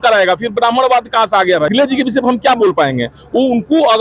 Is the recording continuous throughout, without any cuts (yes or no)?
no